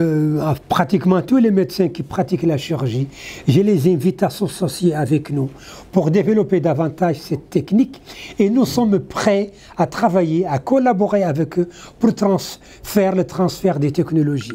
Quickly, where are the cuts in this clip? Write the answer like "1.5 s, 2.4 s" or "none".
none